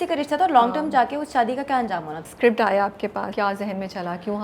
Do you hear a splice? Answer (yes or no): yes